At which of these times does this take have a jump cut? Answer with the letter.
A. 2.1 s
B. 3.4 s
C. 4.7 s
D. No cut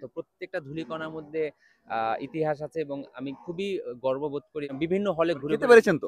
C